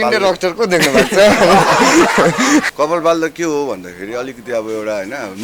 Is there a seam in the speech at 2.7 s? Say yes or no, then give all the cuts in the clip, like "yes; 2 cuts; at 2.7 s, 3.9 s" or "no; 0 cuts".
yes; 1 cut; at 2.7 s